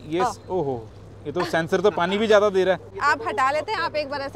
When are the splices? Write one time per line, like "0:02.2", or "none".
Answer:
none